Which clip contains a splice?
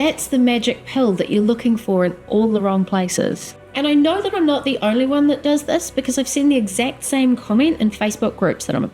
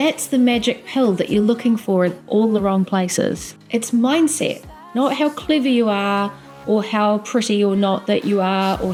first; 1 cut; at 3.5 s

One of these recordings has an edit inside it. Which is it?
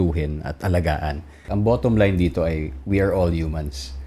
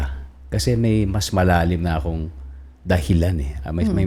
first; 1 cut; at 1.4 s

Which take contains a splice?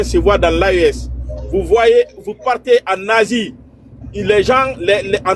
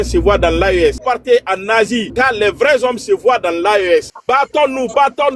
second; 3 cuts; at 1.0 s, 2.1 s, 4.1 s

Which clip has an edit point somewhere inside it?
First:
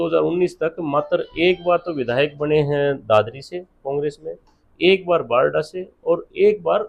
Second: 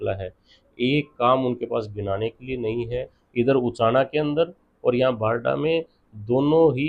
second; 1 cut; at 3.2 s

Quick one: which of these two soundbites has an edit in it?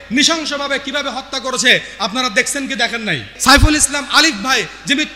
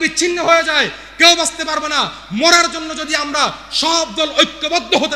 first; 1 cut; at 3.3 s

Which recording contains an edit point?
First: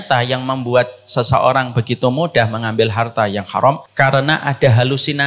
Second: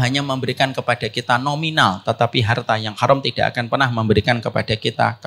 first; 1 cut; at 3.9 s

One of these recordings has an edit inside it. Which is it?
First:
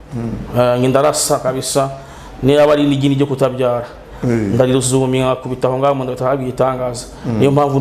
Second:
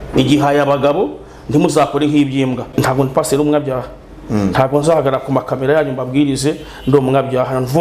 second; 1 cut; at 2.6 s

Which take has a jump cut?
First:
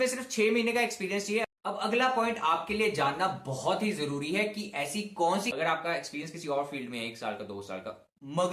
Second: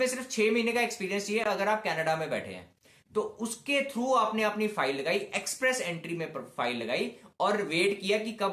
first; 2 cuts; at 1.4 s, 5.5 s

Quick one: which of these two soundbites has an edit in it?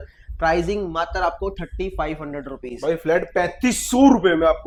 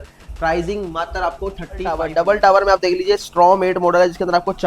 second; 1 cut; at 2.0 s

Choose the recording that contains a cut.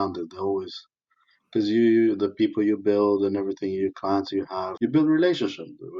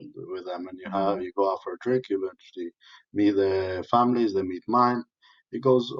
first; 1 cut; at 4.7 s

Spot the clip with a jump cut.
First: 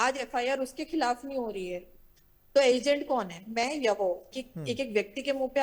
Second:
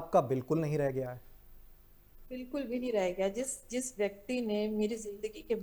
first; 1 cut; at 4.4 s

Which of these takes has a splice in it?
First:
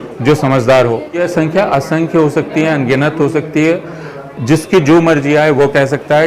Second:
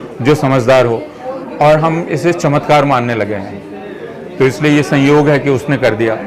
first; 1 cut; at 1.3 s

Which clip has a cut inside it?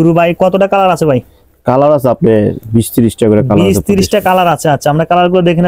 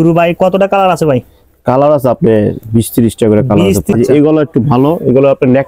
second; 1 cut; at 3.9 s

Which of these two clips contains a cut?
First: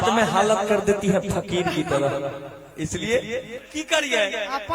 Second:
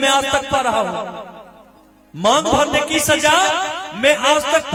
first; 1 cut; at 3.6 s

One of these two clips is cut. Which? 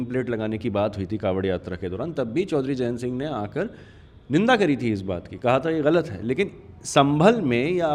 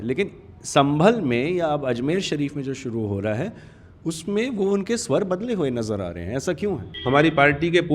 second; 1 cut; at 6.9 s

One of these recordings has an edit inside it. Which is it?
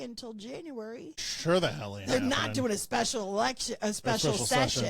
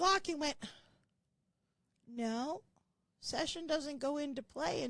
first; 1 cut; at 1.3 s

